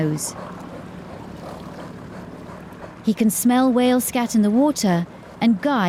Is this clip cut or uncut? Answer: uncut